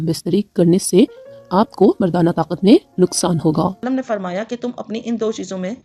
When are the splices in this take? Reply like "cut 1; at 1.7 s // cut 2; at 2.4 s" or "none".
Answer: cut 1; at 3.8 s